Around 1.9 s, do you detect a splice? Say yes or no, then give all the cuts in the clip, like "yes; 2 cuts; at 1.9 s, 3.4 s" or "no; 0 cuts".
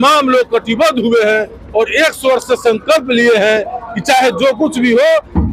no; 0 cuts